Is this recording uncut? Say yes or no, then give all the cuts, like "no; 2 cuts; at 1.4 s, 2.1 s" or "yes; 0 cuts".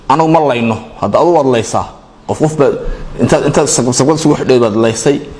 yes; 0 cuts